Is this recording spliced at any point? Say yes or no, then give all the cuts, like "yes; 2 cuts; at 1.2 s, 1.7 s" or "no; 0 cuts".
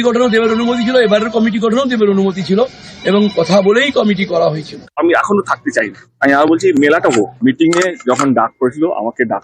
no; 0 cuts